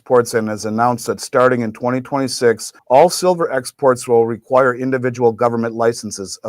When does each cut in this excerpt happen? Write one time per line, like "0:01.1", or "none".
0:02.7